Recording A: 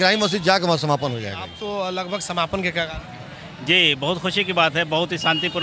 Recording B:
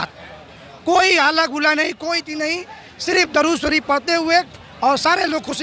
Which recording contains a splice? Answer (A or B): A